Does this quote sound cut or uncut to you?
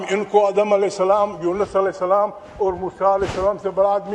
uncut